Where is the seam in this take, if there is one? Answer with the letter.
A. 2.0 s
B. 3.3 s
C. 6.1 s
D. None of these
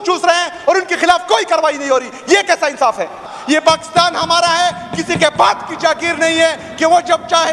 B